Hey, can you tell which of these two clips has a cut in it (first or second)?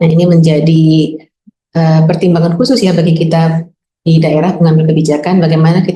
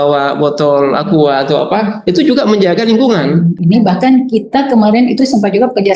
second